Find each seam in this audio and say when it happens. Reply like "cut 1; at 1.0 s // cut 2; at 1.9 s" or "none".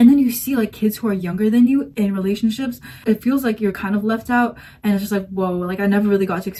none